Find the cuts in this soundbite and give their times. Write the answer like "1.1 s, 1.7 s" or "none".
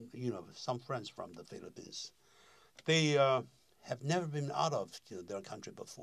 none

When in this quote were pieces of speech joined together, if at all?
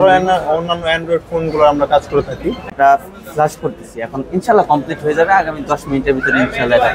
2.8 s

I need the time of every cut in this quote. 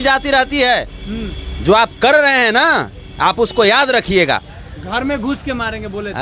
none

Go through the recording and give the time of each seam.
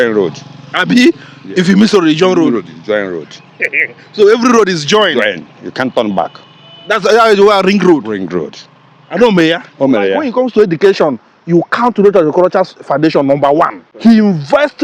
10.2 s, 13.8 s

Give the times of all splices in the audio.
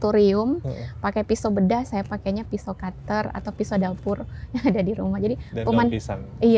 none

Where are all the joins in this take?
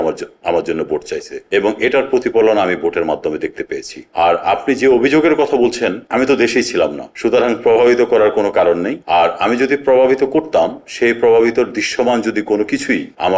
none

